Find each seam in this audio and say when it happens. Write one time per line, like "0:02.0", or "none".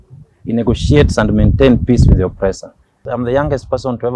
0:03.0